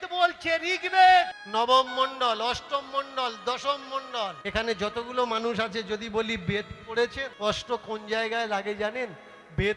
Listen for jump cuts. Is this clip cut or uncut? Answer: cut